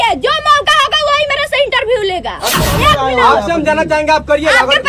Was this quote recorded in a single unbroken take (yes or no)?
no